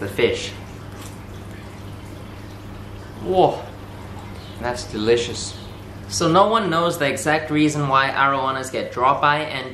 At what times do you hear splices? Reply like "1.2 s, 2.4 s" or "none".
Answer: none